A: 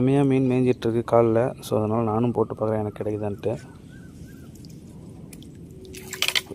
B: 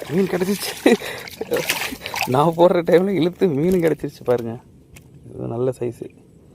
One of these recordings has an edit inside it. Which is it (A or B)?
B